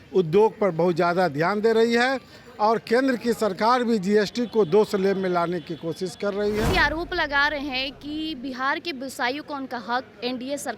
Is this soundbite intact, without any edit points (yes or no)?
no